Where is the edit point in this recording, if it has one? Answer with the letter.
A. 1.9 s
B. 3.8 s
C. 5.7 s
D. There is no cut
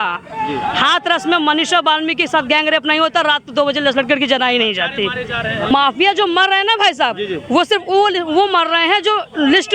C